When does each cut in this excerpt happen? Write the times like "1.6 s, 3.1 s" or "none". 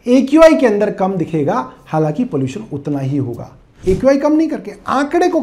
3.8 s